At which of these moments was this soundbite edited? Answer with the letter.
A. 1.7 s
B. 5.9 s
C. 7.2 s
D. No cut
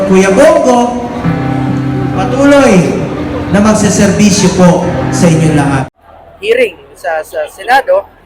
B